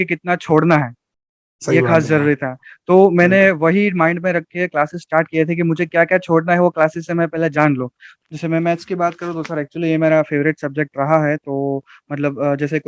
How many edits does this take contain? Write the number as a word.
one